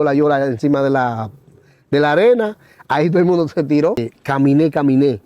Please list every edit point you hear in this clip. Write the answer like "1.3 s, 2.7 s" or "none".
4.2 s